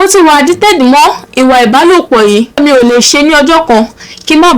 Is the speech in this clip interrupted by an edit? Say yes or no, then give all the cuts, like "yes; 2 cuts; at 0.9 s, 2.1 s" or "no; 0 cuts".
yes; 1 cut; at 2.6 s